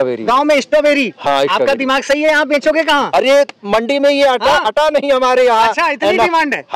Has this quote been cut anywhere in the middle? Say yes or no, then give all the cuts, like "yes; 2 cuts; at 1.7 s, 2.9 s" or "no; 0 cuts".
no; 0 cuts